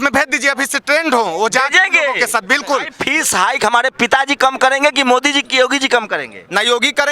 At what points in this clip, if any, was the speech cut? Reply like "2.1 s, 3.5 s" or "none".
3.0 s